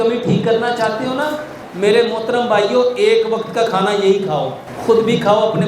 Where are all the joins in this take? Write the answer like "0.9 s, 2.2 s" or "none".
1.6 s, 4.7 s